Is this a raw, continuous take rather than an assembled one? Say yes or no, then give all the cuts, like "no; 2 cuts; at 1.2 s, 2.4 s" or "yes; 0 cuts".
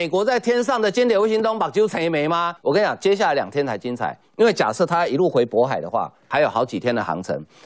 no; 2 cuts; at 2.6 s, 6.3 s